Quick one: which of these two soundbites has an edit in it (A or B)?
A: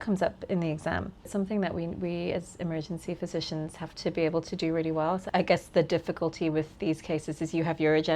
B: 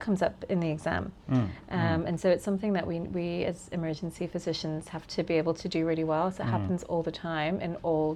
A